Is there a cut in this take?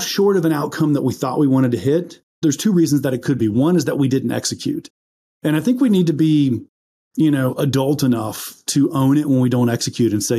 yes; 1 cut; at 2.3 s

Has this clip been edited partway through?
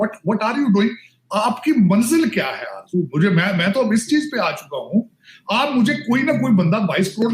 no; 0 cuts

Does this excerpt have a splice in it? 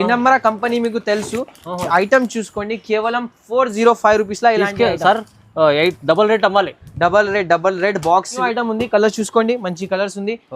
yes; 1 cut; at 8.4 s

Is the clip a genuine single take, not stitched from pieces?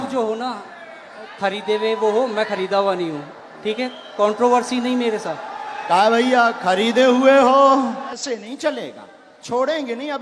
no; 1 cut; at 8.2 s

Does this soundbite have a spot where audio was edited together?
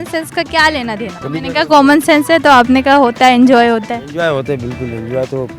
yes; 1 cut; at 1.2 s

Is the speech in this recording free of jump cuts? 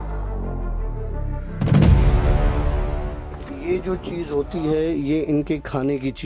yes; 0 cuts

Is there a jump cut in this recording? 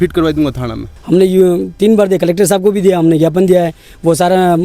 yes; 1 cut; at 0.9 s

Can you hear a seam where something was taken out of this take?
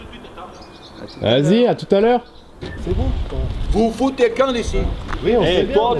yes; 2 cuts; at 2.7 s, 5.1 s

